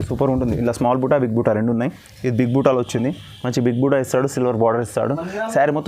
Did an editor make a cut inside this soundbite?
no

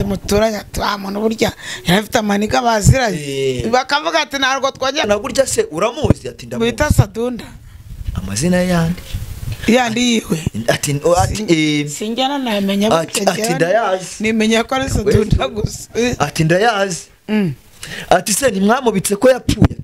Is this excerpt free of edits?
no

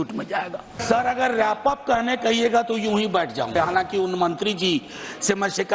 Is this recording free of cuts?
no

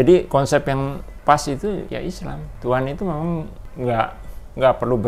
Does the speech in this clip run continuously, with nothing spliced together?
no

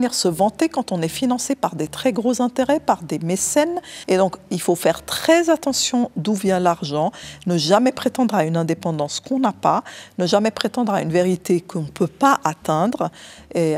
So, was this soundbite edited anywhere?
yes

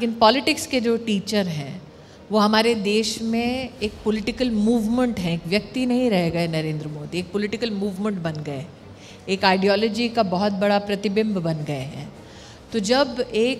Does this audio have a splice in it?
no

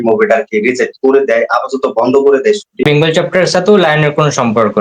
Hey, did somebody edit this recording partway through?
yes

